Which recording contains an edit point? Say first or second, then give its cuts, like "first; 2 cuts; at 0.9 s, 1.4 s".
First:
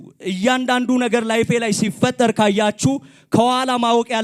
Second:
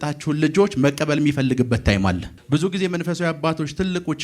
second; 1 cut; at 2.3 s